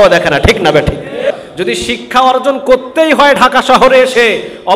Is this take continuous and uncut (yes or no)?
no